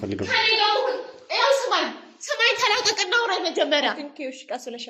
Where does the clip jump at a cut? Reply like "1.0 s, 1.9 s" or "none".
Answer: none

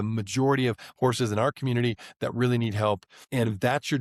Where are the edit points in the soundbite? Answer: none

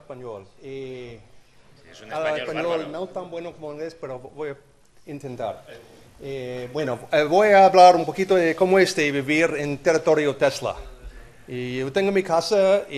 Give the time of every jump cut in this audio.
10.8 s

